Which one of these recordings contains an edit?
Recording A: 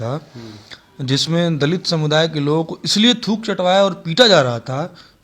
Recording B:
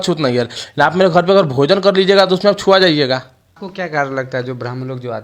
B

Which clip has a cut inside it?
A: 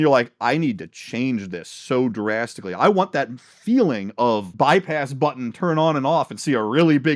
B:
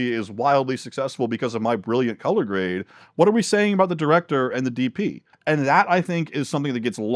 B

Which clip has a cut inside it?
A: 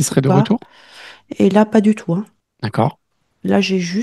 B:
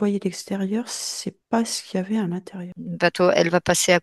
B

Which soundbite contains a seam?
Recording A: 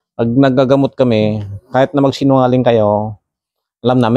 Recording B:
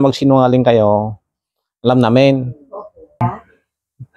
B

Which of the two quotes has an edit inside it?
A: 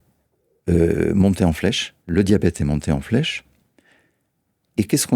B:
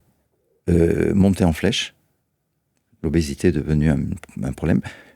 A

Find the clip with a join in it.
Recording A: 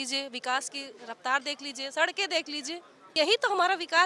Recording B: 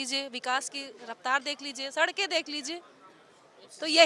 A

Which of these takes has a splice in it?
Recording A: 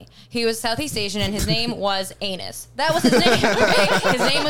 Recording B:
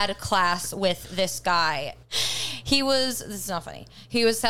B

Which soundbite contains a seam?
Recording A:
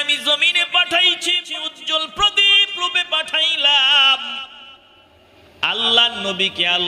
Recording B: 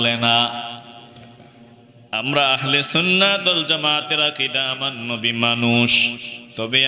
A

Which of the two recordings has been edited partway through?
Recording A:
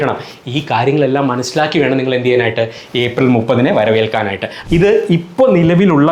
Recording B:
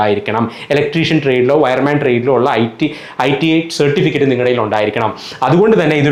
A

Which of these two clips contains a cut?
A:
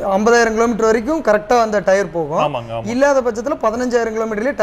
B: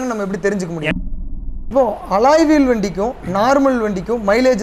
B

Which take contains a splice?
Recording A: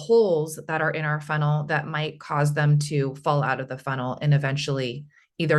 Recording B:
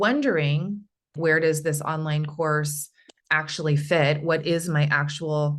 B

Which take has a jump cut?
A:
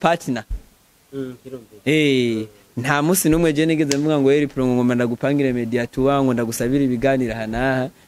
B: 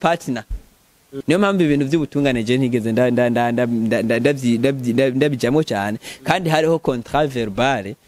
B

